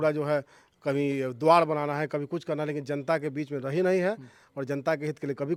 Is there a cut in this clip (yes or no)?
no